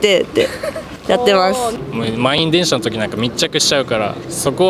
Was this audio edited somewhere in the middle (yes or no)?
yes